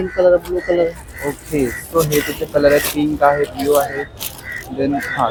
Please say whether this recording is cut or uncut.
uncut